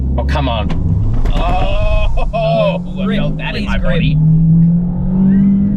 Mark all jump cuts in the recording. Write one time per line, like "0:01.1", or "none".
none